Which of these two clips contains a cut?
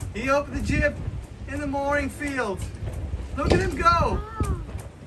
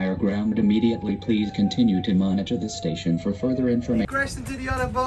second; 1 cut; at 4.0 s

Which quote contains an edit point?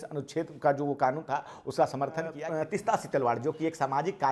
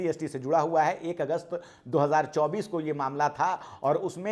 first; 1 cut; at 2.4 s

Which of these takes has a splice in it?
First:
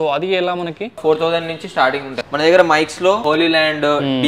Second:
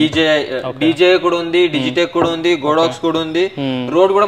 first; 3 cuts; at 1.0 s, 2.1 s, 3.2 s

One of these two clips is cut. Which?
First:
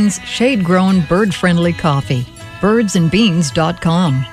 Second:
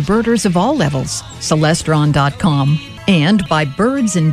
second; 1 cut; at 2.9 s

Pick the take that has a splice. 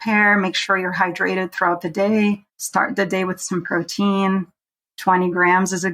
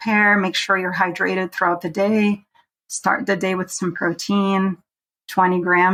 first; 1 cut; at 2.5 s

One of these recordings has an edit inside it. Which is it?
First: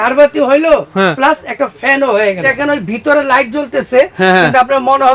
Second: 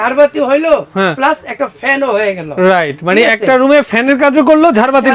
first; 1 cut; at 2.5 s

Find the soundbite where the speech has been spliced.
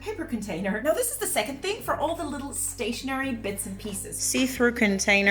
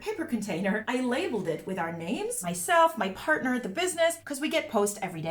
first; 2 cuts; at 0.8 s, 4.3 s

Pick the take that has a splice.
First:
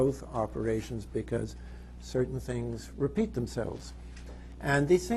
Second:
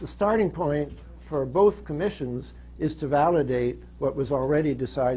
second; 1 cut; at 1.7 s

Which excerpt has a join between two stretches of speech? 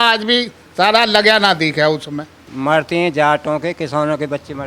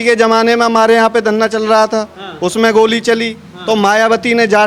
first; 1 cut; at 2.5 s

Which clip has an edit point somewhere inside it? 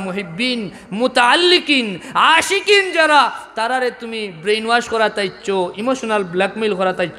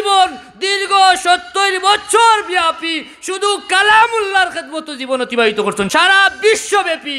second; 1 cut; at 5.9 s

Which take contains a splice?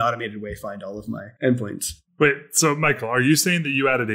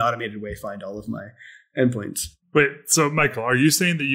first; 1 cut; at 1.3 s

